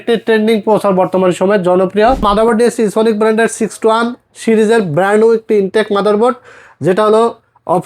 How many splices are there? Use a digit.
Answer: 1